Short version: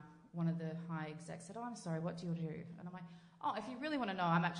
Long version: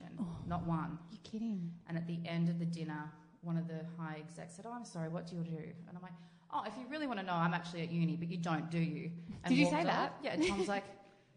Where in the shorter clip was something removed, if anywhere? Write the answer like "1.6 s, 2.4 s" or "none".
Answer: none